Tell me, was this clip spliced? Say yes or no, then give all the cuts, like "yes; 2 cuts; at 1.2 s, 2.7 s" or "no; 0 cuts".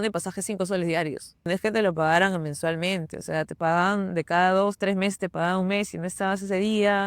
yes; 1 cut; at 1.5 s